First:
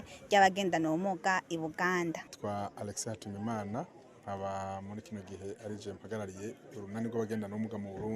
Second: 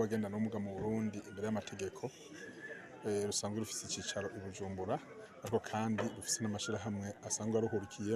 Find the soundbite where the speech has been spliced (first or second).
first